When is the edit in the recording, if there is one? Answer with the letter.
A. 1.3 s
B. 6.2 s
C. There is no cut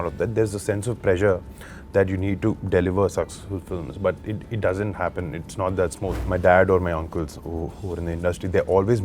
B